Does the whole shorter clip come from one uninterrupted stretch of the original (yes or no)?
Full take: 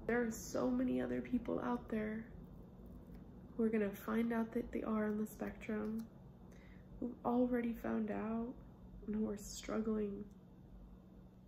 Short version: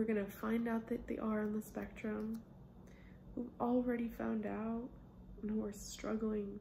yes